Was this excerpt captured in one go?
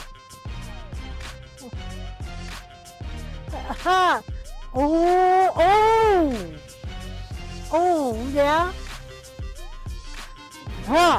yes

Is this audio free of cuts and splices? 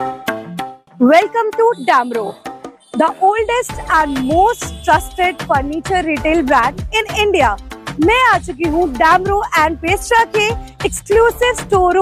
yes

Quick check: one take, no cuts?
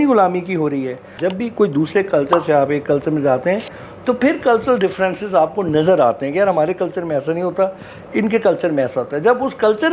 no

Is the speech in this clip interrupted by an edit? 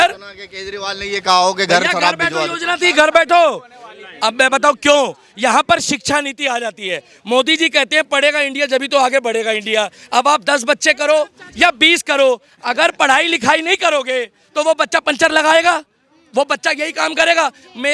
no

